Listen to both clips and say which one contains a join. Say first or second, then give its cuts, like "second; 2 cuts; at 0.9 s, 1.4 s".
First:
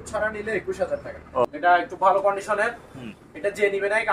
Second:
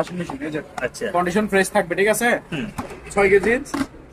first; 1 cut; at 1.0 s